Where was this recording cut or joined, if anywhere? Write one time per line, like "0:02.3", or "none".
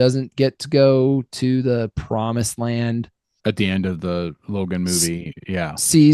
0:03.3